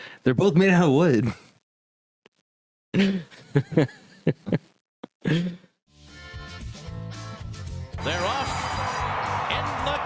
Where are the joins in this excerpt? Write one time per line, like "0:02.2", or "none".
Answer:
0:05.9